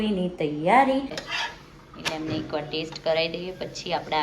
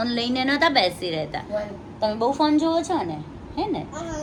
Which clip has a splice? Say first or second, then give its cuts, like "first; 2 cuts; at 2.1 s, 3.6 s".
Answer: first; 1 cut; at 1.2 s